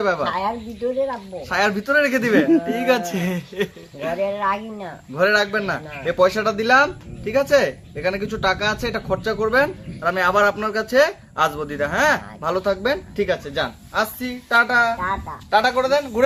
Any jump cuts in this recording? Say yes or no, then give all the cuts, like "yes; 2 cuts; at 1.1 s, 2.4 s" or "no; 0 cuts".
no; 0 cuts